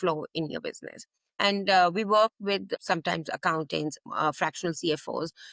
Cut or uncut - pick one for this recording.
cut